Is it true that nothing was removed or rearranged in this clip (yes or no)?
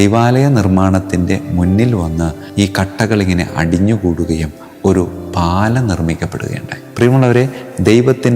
no